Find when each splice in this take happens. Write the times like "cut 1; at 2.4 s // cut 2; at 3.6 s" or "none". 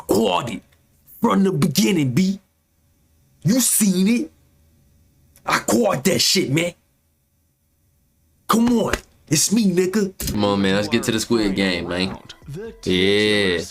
cut 1; at 10.2 s